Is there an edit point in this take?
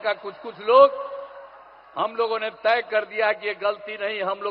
no; 0 cuts

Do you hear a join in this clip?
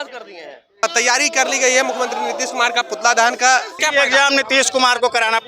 yes; 2 cuts; at 0.8 s, 3.8 s

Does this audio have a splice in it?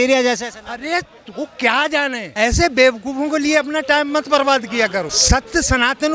no; 0 cuts

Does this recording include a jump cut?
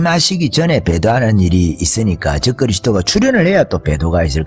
no; 0 cuts

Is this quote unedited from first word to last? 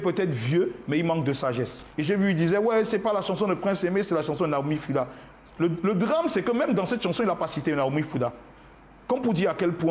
no; 1 cut; at 1.8 s

